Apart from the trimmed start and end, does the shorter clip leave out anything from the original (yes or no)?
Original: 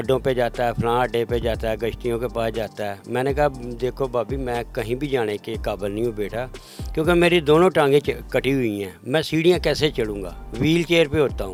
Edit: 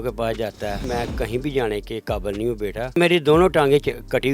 yes